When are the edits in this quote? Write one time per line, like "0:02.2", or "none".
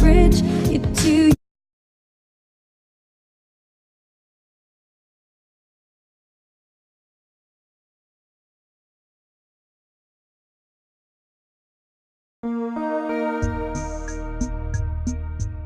none